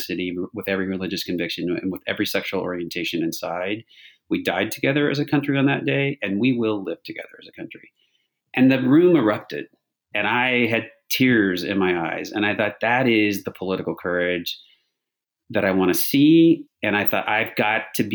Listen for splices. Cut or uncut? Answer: cut